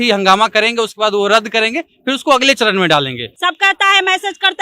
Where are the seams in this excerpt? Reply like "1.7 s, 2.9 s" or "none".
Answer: 3.3 s